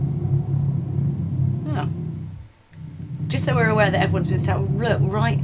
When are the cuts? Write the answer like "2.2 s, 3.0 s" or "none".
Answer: 1.3 s